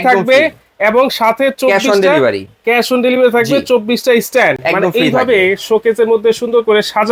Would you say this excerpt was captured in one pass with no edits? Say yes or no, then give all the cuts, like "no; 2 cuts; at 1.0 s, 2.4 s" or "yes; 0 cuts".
yes; 0 cuts